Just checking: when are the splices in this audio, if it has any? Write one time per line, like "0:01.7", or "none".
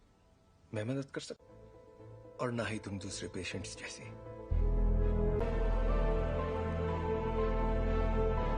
0:05.4